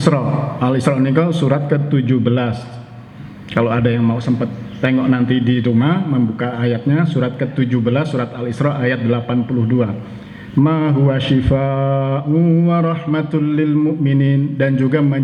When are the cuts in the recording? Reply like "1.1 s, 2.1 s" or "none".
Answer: none